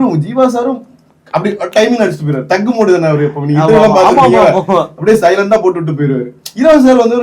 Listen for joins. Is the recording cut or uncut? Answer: uncut